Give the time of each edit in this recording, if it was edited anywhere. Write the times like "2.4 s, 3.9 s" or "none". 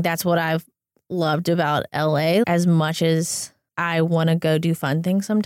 2.4 s